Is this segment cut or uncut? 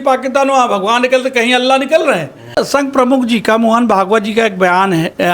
cut